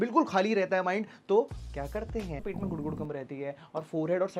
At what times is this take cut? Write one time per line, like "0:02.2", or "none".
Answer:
0:02.5